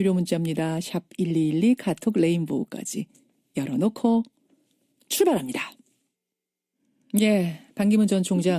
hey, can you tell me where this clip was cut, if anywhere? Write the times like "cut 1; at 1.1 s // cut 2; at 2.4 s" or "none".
cut 1; at 7.0 s